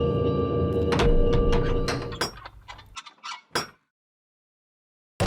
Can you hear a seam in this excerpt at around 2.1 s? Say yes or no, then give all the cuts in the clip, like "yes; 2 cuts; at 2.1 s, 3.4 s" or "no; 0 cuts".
yes; 1 cut; at 2.1 s